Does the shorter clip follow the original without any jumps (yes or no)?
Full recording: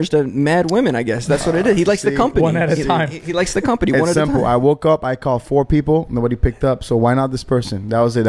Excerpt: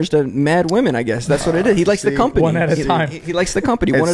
yes